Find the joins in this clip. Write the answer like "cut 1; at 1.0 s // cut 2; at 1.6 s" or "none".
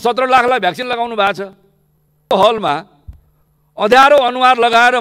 cut 1; at 2.3 s